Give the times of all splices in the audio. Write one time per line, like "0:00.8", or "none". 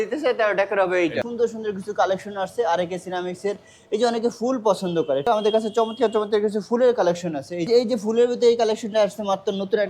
0:01.2
0:05.3
0:07.7